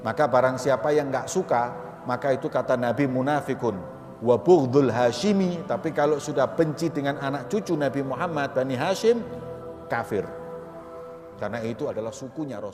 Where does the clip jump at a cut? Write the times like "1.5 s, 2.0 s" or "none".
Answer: none